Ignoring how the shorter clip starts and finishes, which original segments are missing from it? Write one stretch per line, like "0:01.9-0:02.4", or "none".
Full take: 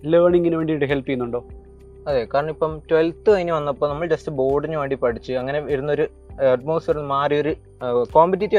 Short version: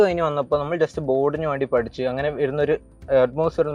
none